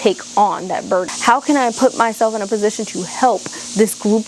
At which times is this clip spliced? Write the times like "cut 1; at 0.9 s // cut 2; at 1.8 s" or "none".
cut 1; at 1.1 s